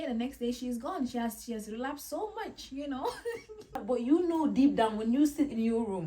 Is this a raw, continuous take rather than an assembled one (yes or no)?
no